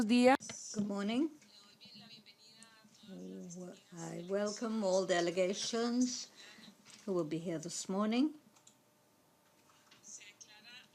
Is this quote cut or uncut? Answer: uncut